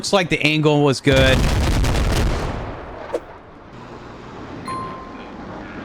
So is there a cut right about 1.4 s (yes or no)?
yes